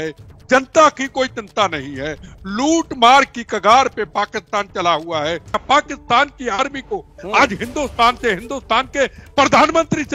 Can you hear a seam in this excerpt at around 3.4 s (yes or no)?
no